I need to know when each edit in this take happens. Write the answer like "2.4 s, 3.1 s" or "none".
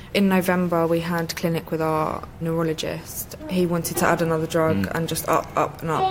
2.4 s